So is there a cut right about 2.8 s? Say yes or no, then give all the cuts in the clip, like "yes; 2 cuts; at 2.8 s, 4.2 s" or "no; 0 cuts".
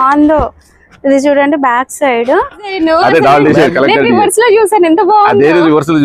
yes; 1 cut; at 2.8 s